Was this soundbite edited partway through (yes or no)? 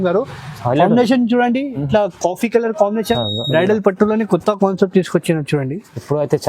yes